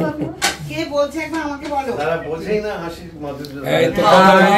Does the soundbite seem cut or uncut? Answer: uncut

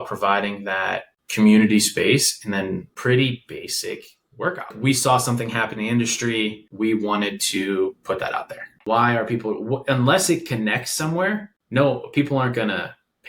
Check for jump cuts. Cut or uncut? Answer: cut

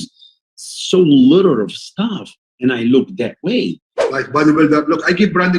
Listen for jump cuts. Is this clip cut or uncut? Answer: cut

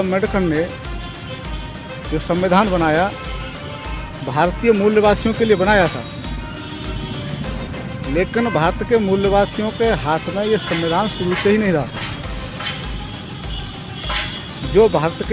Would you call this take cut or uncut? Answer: uncut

